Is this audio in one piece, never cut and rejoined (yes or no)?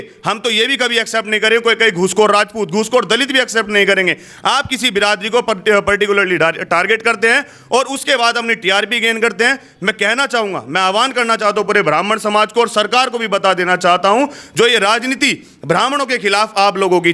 yes